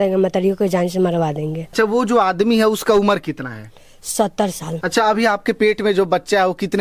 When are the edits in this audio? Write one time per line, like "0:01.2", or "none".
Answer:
0:01.6
0:04.7